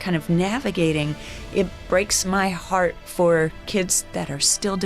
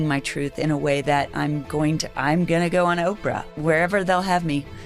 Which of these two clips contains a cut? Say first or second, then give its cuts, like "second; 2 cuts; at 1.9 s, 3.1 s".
second; 1 cut; at 3.6 s